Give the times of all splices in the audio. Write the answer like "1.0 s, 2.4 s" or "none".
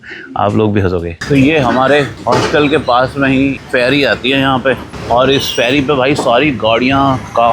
1.2 s, 2.2 s, 3.6 s, 4.9 s